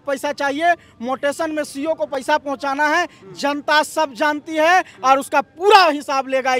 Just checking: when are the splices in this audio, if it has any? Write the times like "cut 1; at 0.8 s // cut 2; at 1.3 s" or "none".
none